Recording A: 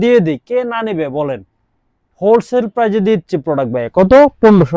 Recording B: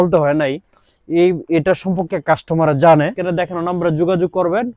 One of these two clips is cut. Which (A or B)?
B